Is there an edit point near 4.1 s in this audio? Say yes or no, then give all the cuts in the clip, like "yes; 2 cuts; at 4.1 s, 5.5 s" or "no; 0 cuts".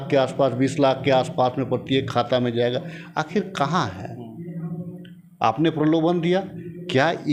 no; 0 cuts